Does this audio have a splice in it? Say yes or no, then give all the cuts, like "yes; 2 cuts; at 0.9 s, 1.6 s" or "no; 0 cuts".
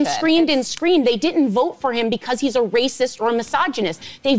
no; 0 cuts